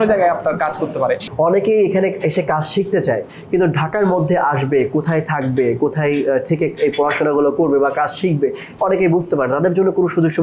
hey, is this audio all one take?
no; 1 cut; at 1.2 s

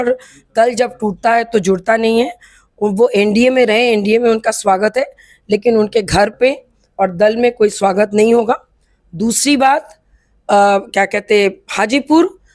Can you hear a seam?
no; 0 cuts

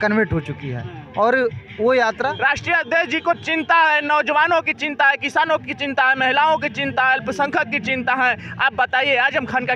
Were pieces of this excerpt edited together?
yes; 1 cut; at 2.3 s

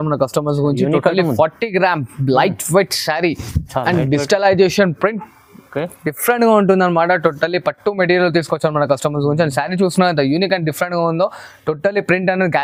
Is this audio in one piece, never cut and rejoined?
yes; 0 cuts

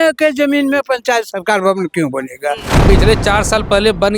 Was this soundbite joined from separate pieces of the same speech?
yes; 1 cut; at 2.7 s

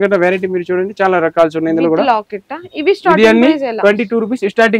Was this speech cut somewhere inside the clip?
no; 0 cuts

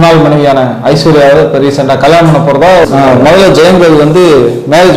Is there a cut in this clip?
yes; 1 cut; at 2.8 s

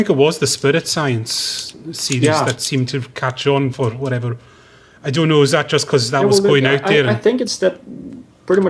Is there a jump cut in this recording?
no; 0 cuts

